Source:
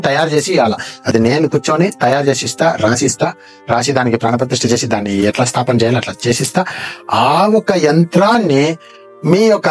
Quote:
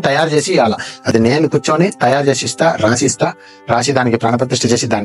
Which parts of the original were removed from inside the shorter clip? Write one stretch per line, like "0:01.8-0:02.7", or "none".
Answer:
none